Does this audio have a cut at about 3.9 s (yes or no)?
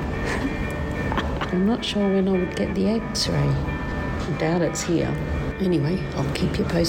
yes